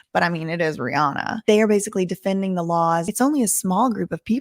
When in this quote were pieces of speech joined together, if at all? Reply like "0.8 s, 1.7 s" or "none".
1.4 s, 3.1 s